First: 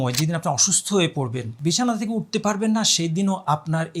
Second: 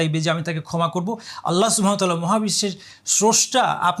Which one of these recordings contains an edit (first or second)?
first